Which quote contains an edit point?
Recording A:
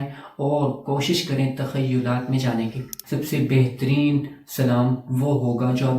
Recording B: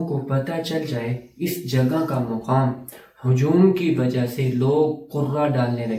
A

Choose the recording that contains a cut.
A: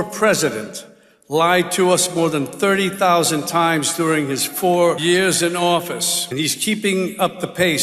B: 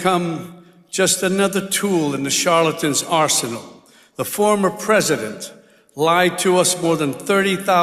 A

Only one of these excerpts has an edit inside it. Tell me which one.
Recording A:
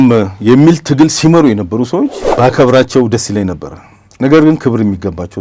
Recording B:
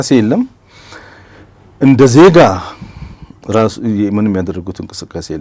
A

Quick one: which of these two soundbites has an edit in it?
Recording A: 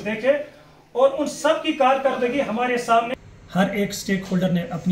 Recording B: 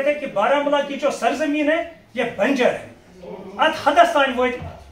A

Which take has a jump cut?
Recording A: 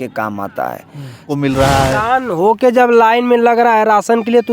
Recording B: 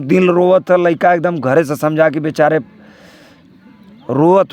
A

